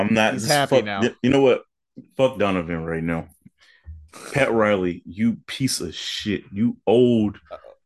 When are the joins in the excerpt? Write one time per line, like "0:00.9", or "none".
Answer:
none

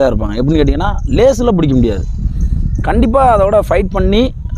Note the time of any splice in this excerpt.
none

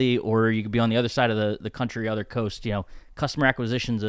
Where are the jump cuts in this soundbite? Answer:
none

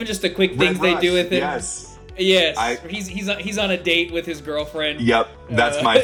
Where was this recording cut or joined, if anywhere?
none

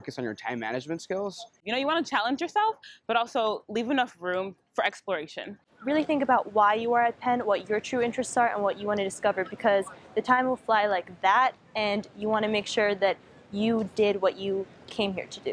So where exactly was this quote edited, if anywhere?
0:07.4

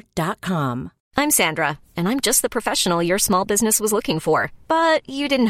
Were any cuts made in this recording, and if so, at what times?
0:01.0

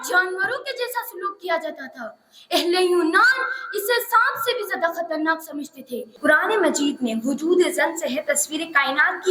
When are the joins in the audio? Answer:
0:06.1

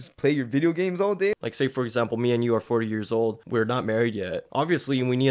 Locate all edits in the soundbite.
0:01.4
0:03.4
0:04.4

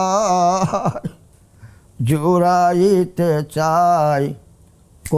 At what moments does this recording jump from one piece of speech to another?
none

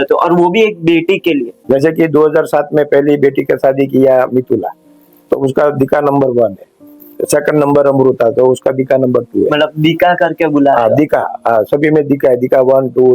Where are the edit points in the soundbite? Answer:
0:01.5

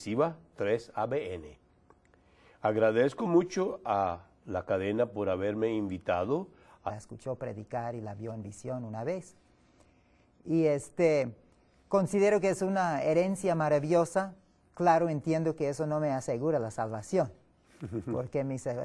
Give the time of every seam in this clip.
none

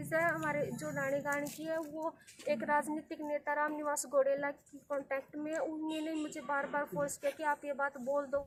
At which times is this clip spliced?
none

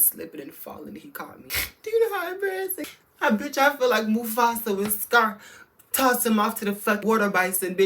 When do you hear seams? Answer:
0:01.4
0:02.8

